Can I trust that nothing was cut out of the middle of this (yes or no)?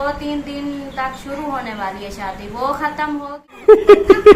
no